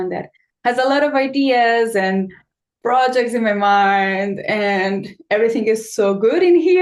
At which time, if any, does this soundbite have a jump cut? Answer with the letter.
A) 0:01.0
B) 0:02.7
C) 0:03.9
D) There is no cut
D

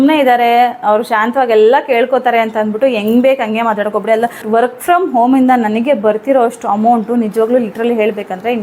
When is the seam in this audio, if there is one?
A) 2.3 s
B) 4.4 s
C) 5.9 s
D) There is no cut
B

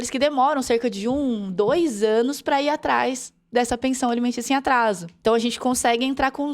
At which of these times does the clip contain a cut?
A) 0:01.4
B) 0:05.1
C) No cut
B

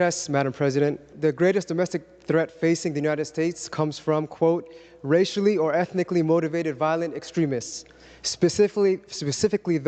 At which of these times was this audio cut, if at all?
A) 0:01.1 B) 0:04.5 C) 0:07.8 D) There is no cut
A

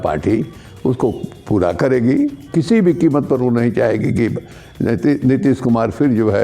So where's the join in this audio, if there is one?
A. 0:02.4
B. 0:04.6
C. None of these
A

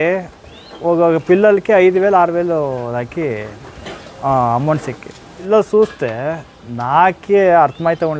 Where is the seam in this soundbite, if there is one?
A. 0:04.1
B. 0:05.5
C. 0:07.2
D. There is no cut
B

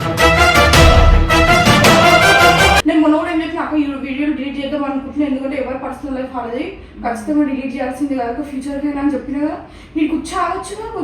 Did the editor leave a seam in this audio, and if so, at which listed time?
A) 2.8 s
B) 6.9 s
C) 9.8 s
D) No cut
A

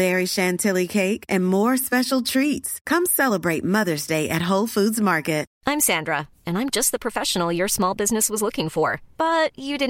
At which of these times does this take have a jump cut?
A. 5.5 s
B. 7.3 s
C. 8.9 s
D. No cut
A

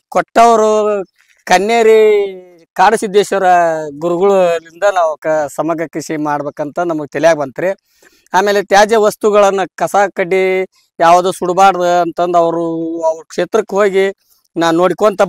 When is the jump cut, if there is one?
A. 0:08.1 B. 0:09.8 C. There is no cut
C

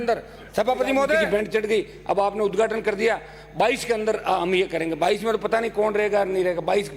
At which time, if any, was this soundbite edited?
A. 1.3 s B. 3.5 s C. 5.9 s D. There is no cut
A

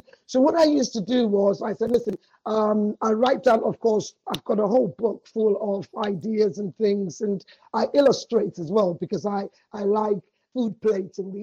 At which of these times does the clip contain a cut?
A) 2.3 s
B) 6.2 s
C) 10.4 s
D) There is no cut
C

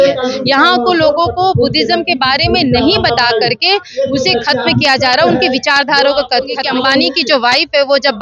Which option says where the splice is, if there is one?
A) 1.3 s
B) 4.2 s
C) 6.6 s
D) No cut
C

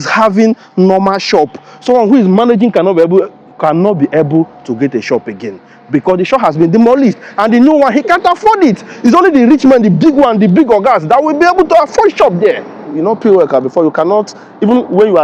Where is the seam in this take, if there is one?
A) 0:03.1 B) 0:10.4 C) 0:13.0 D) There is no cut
C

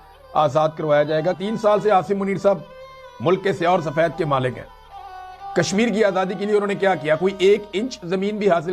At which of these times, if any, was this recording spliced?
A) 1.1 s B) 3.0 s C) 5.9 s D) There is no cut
D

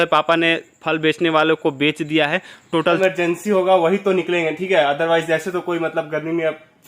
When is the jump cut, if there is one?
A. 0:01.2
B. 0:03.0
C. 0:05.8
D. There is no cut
B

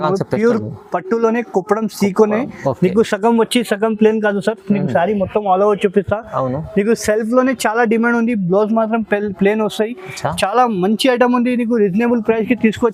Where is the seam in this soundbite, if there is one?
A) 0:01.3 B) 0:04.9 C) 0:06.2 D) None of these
D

